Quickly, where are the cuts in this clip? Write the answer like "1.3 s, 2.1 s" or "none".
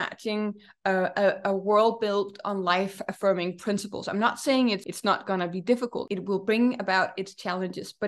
4.9 s, 6.0 s

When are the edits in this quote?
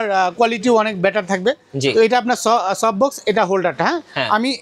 none

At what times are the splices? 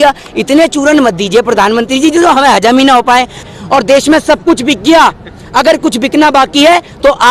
3.4 s

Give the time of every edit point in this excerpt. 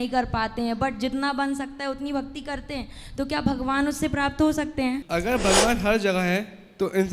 5.0 s

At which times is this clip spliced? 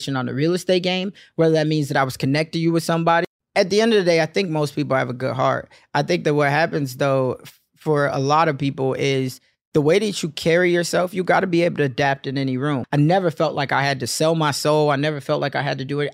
3.2 s, 12.8 s

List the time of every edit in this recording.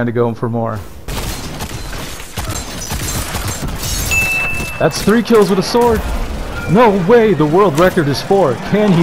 1.1 s

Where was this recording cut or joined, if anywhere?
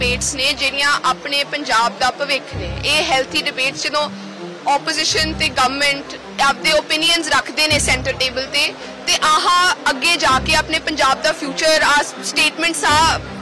none

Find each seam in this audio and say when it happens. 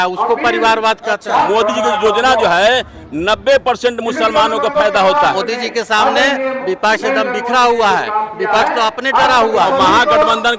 1.5 s, 5.4 s, 9.7 s

